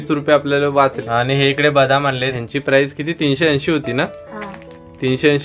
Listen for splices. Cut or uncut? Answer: cut